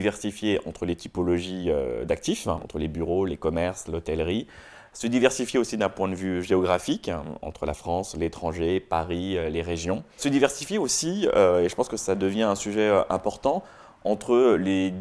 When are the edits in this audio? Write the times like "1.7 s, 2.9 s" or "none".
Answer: 2.6 s, 10.2 s

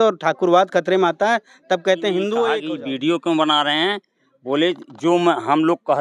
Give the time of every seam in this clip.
2.7 s

